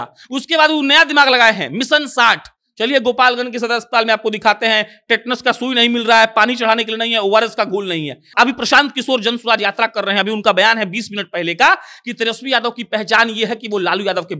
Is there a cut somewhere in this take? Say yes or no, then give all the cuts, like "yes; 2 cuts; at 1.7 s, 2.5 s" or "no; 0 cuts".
yes; 1 cut; at 8.3 s